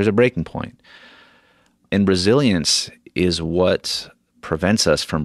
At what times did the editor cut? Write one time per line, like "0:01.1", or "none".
0:01.8